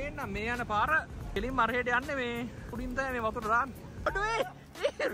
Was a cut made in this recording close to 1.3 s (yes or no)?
yes